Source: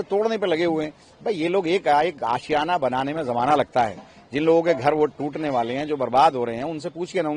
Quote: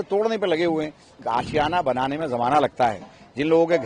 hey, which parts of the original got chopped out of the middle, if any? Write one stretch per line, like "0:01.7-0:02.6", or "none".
0:01.2-0:02.1